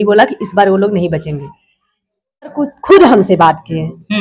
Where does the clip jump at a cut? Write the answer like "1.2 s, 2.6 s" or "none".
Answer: 2.7 s